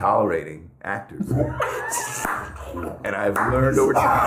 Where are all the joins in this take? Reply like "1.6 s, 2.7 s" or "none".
2.9 s